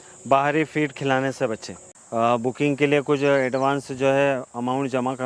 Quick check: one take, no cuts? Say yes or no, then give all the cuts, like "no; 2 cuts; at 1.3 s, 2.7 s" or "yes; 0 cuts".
no; 1 cut; at 1.9 s